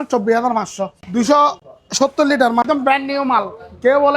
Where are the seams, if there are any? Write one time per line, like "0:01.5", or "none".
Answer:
0:01.0
0:02.6

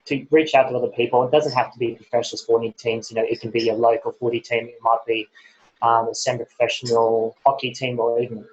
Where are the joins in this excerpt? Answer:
0:07.3

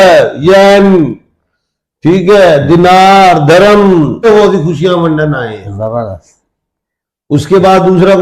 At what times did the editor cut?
0:04.2

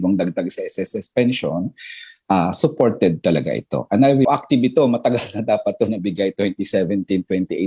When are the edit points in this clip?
0:04.3

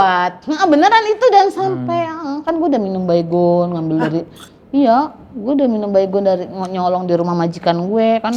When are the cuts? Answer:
none

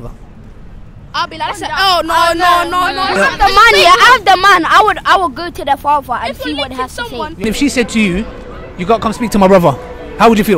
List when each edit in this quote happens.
0:03.1
0:07.3

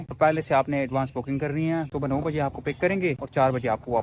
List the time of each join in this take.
0:01.9

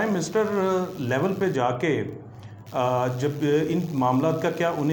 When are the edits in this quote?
none

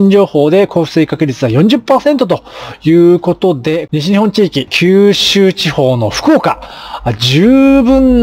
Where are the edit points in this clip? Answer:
0:03.8
0:04.7

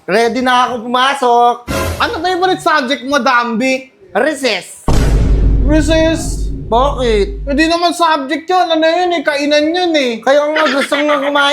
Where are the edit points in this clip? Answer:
none

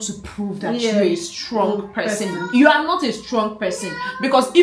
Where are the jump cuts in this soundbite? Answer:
none

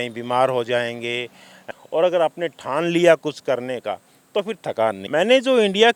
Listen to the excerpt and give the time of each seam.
0:01.6
0:05.0

